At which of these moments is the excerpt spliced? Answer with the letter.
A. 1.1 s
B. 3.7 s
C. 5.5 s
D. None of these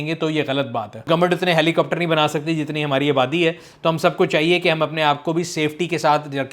A